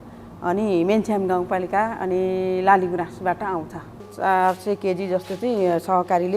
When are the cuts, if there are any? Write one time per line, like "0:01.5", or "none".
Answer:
0:04.1